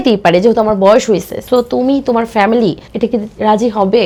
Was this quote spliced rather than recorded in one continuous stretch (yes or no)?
no